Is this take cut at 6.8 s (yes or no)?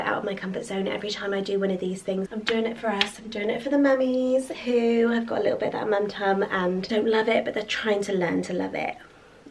yes